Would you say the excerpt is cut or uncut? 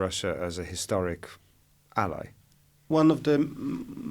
cut